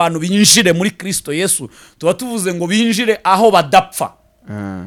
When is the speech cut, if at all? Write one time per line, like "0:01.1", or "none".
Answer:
none